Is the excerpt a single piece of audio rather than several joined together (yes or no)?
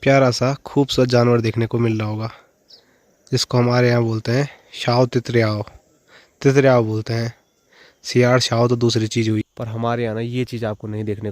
no